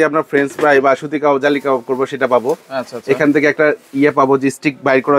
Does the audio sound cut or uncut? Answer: uncut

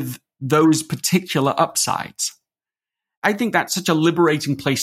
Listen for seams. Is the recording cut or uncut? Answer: cut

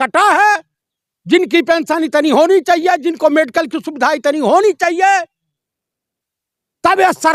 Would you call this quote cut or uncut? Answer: uncut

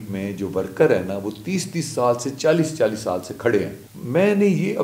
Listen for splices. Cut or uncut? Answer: cut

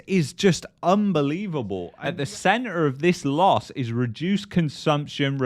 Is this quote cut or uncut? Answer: cut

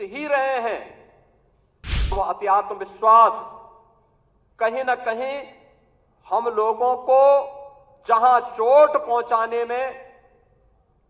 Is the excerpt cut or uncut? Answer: cut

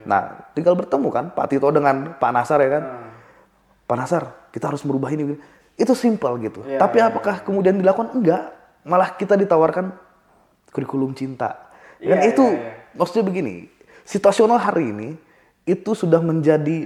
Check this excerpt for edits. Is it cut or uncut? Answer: uncut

